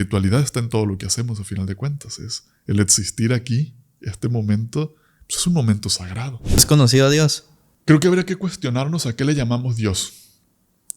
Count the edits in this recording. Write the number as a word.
one